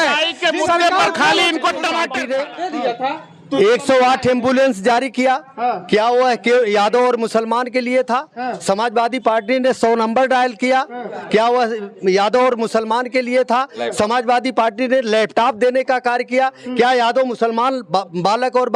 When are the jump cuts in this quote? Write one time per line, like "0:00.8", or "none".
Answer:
0:02.1